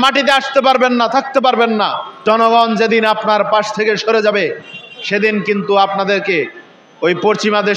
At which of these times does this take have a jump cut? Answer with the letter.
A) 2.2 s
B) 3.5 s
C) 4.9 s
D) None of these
A